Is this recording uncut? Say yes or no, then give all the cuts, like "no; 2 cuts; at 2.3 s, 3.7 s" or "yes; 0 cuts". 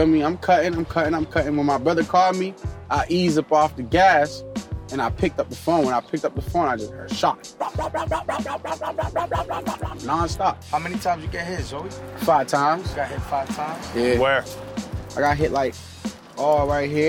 yes; 0 cuts